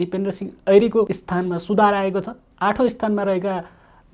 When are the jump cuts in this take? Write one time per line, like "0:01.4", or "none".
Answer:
0:01.2